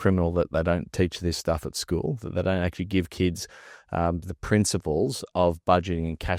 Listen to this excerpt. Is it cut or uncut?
uncut